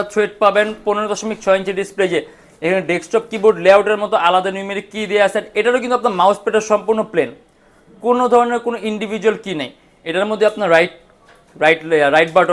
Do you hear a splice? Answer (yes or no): no